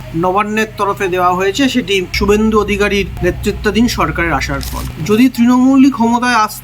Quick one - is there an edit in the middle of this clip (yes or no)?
yes